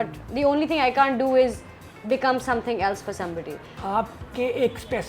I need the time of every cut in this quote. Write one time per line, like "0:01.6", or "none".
0:03.8